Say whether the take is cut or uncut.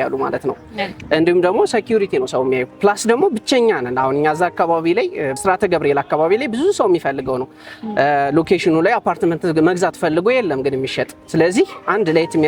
uncut